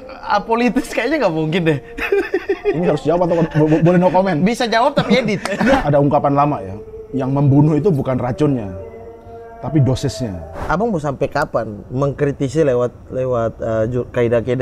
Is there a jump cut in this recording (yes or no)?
yes